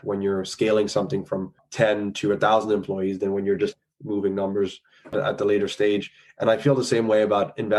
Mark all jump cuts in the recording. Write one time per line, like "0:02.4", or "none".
none